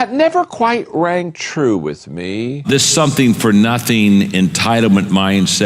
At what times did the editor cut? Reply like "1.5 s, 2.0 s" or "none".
2.7 s